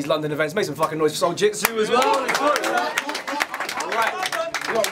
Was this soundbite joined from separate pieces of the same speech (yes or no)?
no